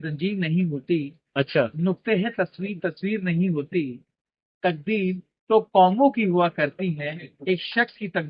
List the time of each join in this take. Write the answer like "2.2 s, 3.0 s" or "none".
none